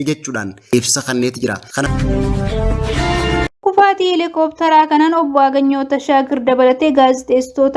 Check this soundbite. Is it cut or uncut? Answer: cut